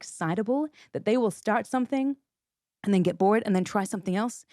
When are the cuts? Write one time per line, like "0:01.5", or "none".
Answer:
none